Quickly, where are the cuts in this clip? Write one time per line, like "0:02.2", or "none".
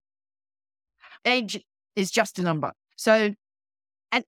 0:01.1